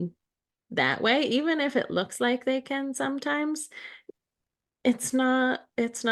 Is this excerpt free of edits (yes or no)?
yes